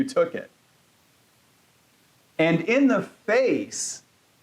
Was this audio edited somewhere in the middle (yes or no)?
no